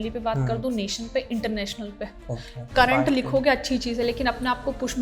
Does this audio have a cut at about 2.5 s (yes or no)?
yes